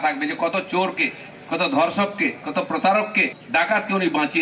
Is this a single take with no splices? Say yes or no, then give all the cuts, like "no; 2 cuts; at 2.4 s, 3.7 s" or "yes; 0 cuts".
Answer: no; 1 cut; at 3.4 s